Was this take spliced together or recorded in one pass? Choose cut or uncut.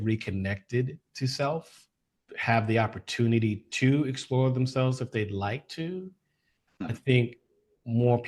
uncut